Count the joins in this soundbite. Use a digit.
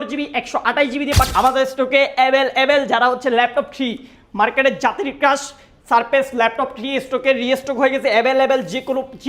1